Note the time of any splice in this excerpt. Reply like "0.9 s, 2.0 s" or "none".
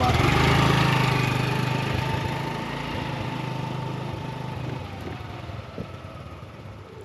none